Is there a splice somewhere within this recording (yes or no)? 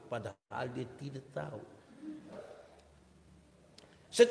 yes